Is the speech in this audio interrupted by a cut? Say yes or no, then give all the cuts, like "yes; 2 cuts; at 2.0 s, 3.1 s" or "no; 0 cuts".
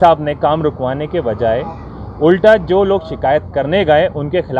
no; 0 cuts